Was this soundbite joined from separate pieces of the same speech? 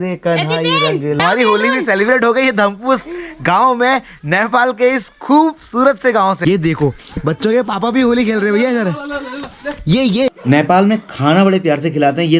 yes; 3 cuts; at 1.2 s, 6.4 s, 10.3 s

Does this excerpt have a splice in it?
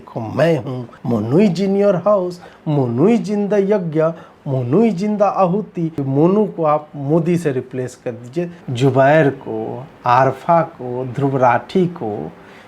yes; 3 cuts; at 0.9 s, 6.0 s, 8.6 s

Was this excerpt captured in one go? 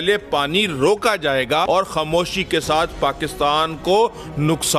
no; 1 cut; at 1.7 s

